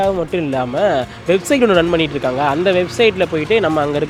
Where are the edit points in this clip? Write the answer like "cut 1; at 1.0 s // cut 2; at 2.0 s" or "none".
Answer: none